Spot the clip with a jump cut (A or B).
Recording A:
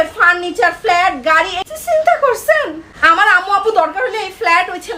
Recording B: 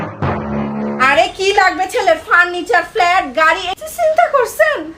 B